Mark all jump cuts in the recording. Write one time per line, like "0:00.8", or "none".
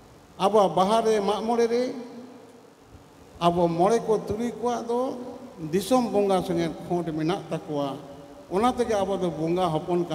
none